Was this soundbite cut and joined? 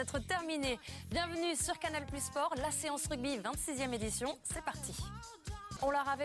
no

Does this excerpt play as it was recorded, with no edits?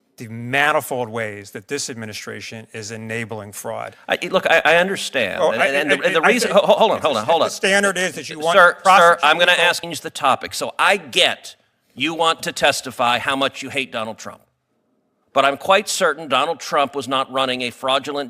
no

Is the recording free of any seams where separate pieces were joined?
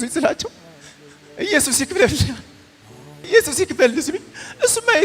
no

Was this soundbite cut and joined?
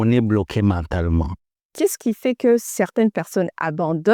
yes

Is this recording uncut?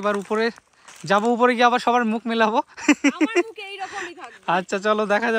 yes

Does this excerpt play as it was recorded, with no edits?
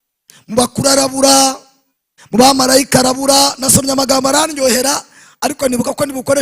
yes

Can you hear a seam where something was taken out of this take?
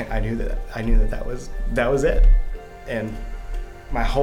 yes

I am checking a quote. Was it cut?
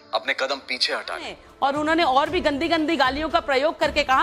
yes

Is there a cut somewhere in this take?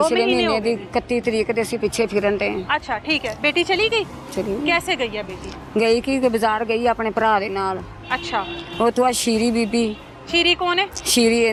no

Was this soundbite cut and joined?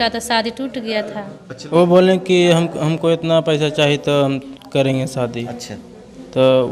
yes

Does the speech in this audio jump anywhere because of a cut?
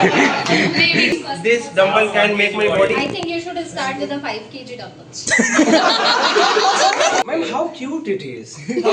yes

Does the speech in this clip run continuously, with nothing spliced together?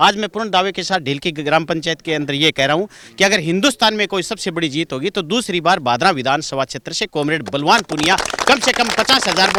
yes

